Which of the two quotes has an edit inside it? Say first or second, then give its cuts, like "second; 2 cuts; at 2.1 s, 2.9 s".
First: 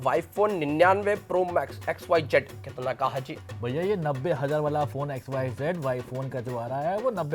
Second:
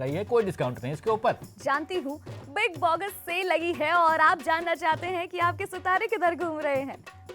second; 1 cut; at 1.4 s